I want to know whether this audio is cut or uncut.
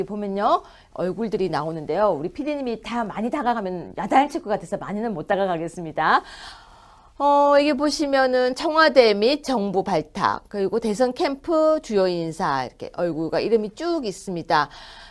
cut